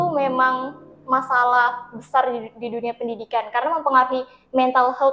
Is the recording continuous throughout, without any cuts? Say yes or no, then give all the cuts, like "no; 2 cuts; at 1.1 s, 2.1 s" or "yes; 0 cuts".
yes; 0 cuts